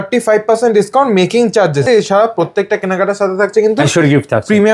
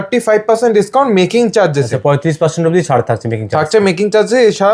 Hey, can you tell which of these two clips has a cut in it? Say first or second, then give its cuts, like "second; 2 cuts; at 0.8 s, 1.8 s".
first; 1 cut; at 1.9 s